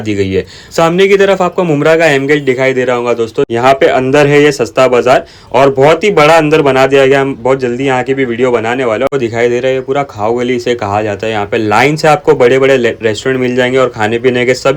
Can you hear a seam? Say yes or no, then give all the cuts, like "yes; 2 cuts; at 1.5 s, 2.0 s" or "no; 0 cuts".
yes; 2 cuts; at 3.5 s, 9.1 s